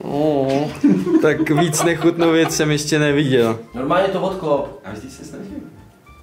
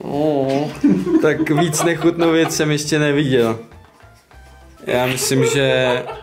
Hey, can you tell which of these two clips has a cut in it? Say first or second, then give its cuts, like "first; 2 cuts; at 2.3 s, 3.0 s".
first; 1 cut; at 3.7 s